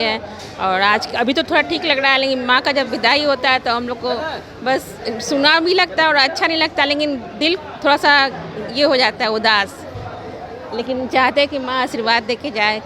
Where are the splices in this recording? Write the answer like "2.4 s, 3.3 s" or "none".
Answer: none